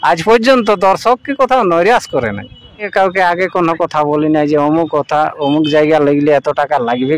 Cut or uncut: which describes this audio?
cut